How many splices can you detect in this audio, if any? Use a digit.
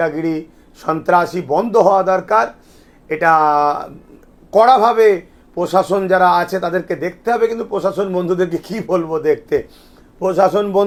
0